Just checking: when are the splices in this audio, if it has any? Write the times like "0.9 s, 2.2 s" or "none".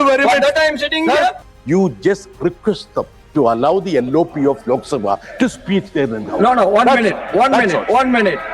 1.5 s